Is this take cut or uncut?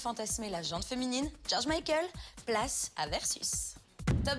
cut